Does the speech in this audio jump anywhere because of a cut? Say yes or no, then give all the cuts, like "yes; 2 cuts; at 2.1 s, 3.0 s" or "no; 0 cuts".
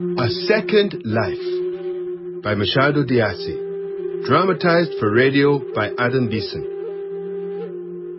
yes; 1 cut; at 2.3 s